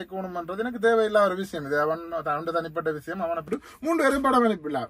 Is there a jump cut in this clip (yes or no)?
yes